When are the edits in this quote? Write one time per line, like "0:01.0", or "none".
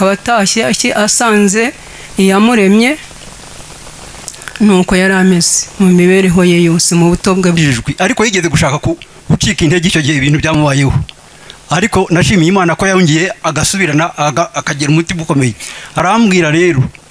0:07.6